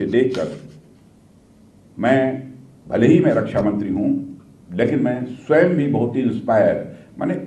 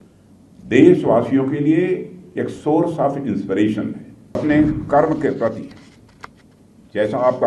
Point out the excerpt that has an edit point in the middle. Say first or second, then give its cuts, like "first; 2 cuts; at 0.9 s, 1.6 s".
second; 1 cut; at 4.4 s